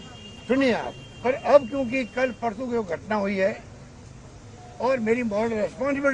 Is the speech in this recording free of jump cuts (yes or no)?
yes